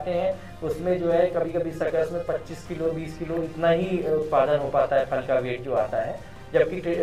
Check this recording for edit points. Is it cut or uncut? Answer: uncut